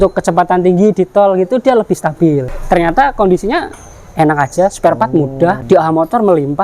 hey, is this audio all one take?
no; 2 cuts; at 2.5 s, 5.6 s

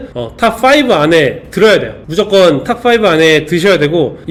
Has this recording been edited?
no; 0 cuts

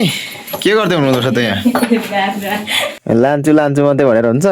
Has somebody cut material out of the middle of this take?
yes; 1 cut; at 2.8 s

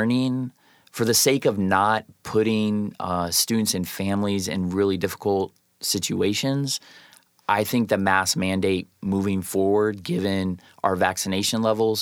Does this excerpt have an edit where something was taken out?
no; 0 cuts

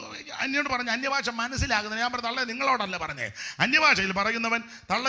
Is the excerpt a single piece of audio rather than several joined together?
yes; 0 cuts

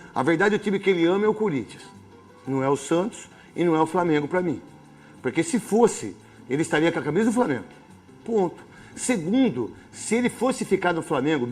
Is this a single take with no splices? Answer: yes; 0 cuts

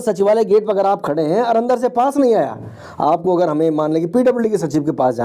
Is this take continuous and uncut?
yes; 0 cuts

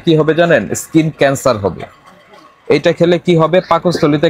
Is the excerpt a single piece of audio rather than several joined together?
yes; 0 cuts

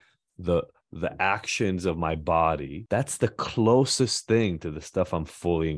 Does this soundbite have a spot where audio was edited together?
yes; 1 cut; at 2.7 s

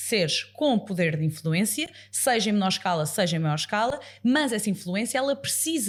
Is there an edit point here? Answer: no; 0 cuts

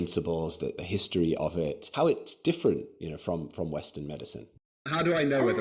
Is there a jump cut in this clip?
yes; 3 cuts; at 0.8 s, 1.9 s, 4.5 s

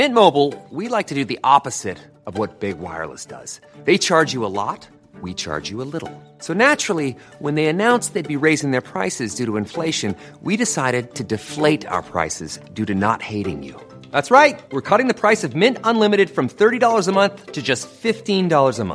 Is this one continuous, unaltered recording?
yes; 0 cuts

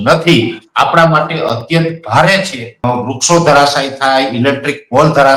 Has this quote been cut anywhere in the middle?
yes; 1 cut; at 2.7 s

